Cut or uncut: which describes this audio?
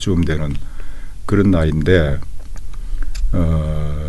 uncut